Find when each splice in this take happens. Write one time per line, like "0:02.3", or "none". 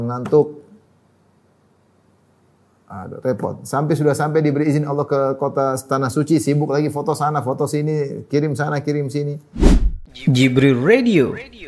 0:09.6